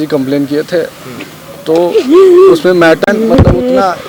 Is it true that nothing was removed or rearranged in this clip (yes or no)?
no